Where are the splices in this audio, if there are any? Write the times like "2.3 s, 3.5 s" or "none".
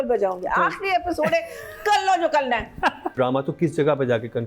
3.1 s